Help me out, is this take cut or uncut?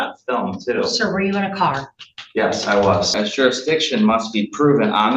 cut